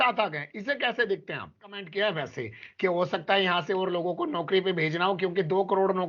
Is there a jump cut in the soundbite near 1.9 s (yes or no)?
yes